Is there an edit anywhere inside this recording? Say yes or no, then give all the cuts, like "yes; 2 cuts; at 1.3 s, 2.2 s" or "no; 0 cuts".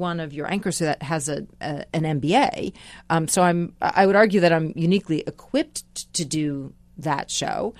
no; 0 cuts